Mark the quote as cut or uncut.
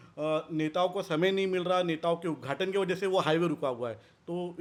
uncut